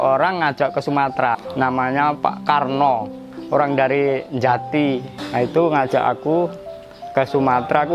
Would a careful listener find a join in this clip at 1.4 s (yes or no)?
yes